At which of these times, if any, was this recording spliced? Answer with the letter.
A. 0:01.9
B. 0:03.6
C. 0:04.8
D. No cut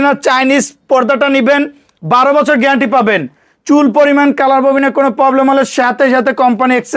D